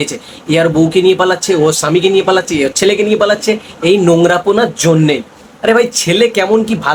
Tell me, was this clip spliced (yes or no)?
no